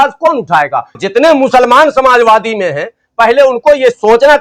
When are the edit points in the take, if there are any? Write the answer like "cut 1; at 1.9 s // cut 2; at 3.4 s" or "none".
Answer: cut 1; at 1.0 s